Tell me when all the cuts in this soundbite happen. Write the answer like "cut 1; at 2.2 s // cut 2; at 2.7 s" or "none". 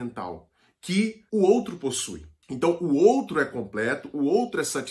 none